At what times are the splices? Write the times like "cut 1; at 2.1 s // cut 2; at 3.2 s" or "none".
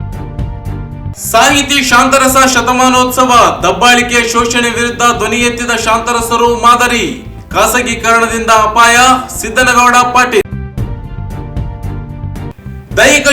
cut 1; at 1.1 s